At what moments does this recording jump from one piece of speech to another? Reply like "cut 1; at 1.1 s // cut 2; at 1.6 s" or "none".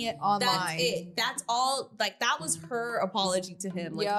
none